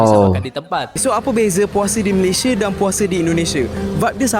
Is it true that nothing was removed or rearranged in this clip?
no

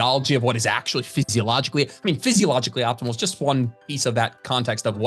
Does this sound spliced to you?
no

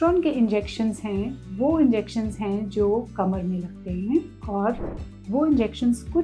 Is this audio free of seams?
yes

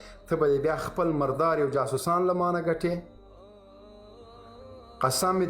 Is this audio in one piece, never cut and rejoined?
yes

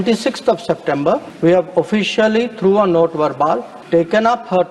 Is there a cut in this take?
yes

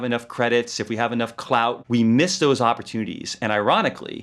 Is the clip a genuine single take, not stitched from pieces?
no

